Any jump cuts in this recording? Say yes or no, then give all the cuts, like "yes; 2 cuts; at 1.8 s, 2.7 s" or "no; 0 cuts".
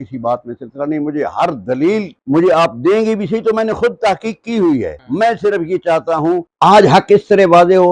yes; 1 cut; at 6.5 s